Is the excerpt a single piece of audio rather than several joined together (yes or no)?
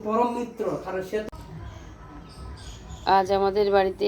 no